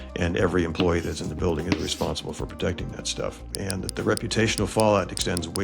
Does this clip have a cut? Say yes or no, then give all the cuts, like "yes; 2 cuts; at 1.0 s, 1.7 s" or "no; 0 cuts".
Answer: yes; 1 cut; at 3.4 s